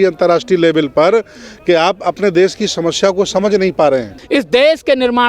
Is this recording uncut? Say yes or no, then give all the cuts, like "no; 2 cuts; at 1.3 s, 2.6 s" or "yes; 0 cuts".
no; 1 cut; at 4.2 s